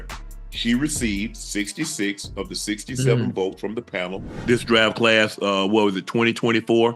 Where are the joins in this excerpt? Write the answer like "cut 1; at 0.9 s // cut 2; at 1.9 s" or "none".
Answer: cut 1; at 4.3 s